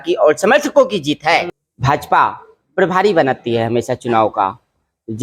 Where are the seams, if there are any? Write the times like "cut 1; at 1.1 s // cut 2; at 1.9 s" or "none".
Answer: cut 1; at 1.5 s